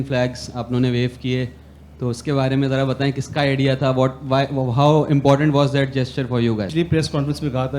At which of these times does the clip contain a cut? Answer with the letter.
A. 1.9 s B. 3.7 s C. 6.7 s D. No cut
C